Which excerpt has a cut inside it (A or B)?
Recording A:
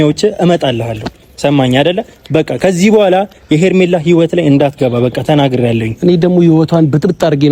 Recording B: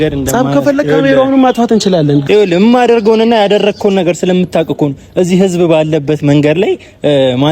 B